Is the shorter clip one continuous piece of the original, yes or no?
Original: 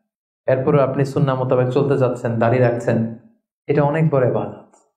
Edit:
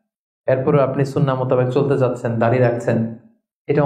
yes